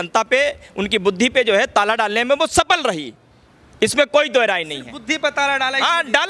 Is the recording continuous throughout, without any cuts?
yes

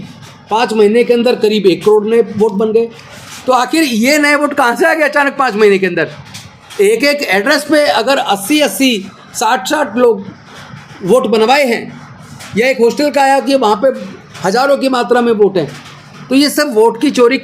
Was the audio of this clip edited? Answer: no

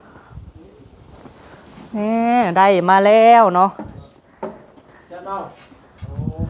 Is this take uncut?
no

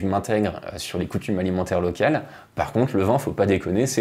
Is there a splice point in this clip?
no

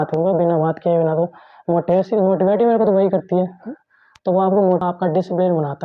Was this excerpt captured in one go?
no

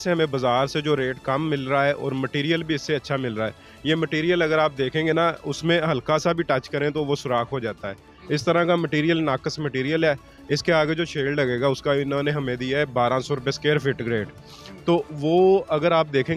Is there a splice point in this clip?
no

